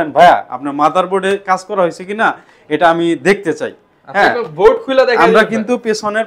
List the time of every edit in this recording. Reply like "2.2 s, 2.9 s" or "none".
none

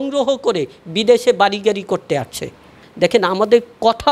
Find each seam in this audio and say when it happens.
2.8 s

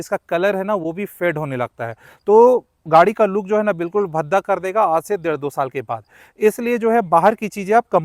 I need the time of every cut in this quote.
none

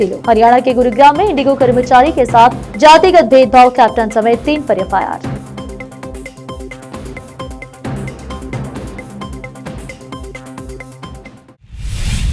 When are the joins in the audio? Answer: 11.4 s

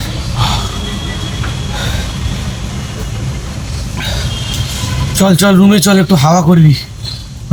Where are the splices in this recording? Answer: none

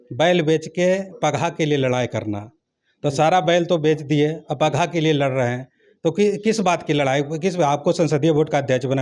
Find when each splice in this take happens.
none

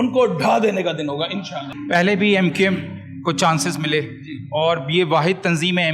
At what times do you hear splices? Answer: 1.7 s

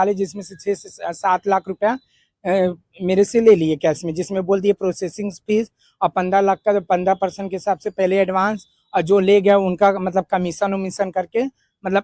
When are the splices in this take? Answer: none

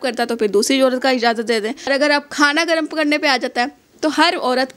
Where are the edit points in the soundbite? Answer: 1.9 s

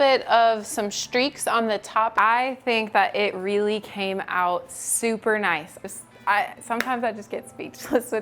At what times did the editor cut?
2.1 s, 5.7 s

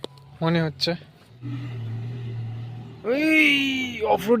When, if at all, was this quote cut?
1.4 s

